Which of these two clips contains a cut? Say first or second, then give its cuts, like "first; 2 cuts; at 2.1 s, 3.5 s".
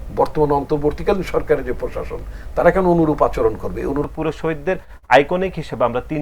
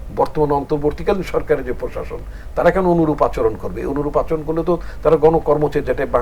first; 1 cut; at 4.0 s